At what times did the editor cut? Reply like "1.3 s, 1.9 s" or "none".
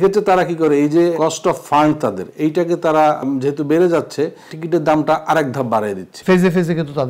1.1 s, 3.2 s, 4.5 s, 6.1 s